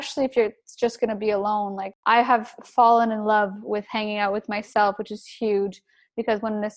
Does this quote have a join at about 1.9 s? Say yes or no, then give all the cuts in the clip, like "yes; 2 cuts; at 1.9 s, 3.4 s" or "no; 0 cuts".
yes; 1 cut; at 1.9 s